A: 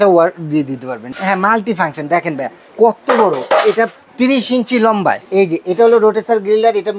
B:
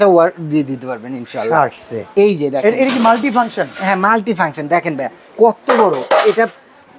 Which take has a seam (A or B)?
A